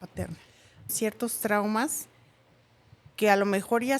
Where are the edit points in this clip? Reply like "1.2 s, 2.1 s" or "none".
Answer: 0.9 s